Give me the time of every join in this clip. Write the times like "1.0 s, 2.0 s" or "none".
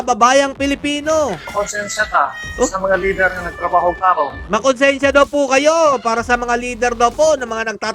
1.4 s, 4.4 s